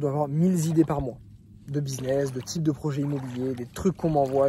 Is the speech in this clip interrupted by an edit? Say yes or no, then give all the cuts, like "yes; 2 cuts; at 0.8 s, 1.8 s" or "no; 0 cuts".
no; 0 cuts